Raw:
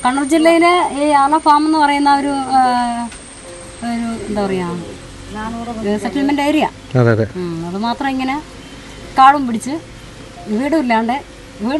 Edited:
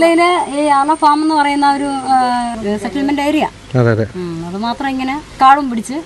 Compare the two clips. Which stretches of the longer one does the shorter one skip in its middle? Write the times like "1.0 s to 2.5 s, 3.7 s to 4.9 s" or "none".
3.0 s to 5.7 s, 8.5 s to 9.0 s